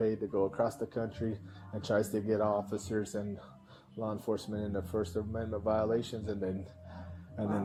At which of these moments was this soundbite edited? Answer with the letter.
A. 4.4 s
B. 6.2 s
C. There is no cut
C